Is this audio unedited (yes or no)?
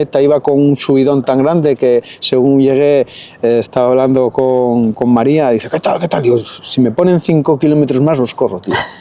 yes